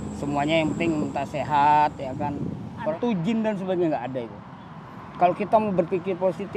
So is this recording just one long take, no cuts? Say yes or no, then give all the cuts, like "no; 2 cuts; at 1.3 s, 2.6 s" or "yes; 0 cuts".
no; 1 cut; at 2.9 s